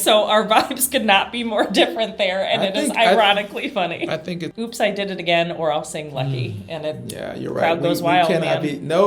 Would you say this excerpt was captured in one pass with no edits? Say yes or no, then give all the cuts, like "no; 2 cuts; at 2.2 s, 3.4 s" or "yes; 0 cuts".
no; 1 cut; at 4.5 s